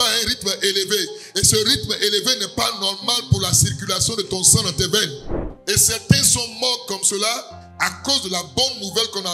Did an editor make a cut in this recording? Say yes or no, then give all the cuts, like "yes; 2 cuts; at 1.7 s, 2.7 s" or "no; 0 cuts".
yes; 1 cut; at 5.5 s